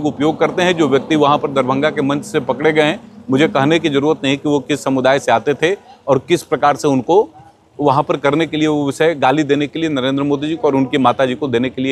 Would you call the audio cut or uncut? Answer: uncut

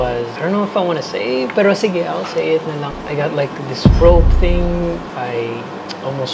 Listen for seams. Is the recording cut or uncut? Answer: cut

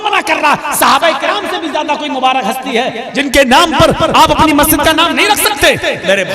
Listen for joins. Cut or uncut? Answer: uncut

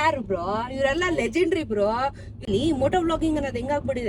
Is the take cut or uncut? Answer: cut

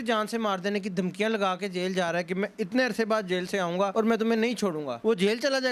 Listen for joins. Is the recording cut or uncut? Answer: cut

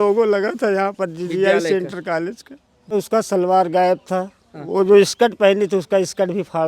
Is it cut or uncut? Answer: cut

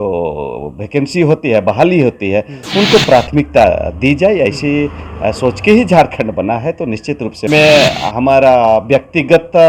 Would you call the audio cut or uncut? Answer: cut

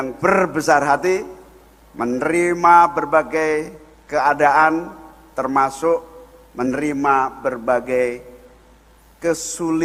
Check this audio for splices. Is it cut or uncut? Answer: uncut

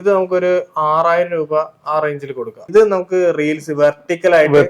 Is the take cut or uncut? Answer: cut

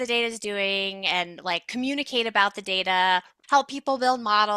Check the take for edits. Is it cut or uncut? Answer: cut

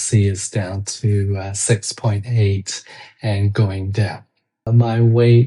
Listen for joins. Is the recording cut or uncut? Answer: cut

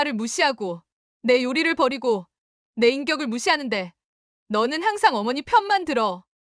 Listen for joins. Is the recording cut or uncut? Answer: uncut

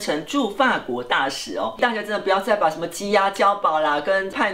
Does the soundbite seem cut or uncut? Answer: cut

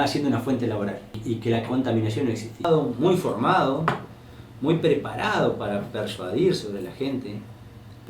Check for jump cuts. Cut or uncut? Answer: cut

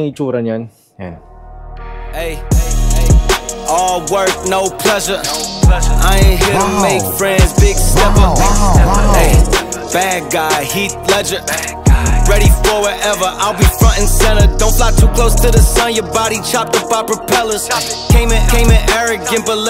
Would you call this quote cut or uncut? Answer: uncut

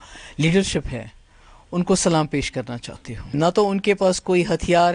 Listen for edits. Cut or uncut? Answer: cut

